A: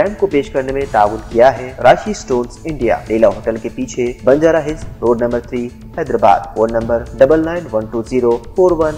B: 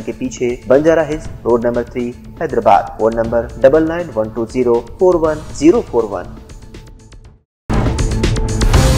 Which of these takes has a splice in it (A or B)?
B